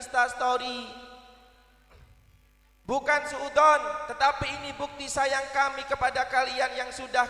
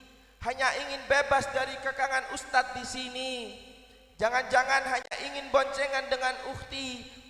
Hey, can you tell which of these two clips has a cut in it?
first; 1 cut; at 2.7 s

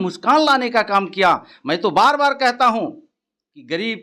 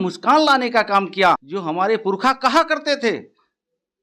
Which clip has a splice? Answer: second; 1 cut; at 1.5 s

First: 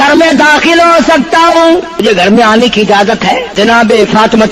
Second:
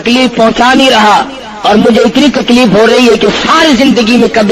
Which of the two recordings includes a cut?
first; 2 cuts; at 2.0 s, 3.5 s

